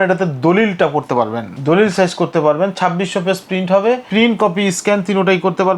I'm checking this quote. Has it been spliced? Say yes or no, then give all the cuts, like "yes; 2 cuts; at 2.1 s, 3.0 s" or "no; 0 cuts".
yes; 2 cuts; at 1.4 s, 4.0 s